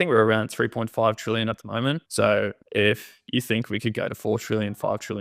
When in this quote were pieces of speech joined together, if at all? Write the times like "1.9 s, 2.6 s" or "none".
2.0 s, 2.6 s